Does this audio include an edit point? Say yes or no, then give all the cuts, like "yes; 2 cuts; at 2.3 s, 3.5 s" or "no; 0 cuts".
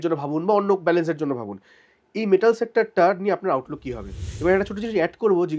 yes; 1 cut; at 4.2 s